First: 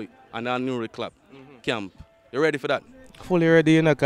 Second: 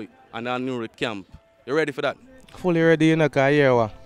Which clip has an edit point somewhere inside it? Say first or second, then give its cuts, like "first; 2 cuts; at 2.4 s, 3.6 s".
second; 1 cut; at 0.9 s